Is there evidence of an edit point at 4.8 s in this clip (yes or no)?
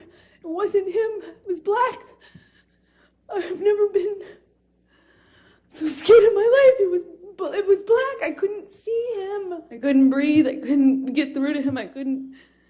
no